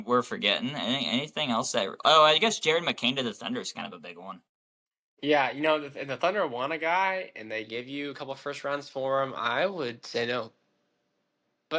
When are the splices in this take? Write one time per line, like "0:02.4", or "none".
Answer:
none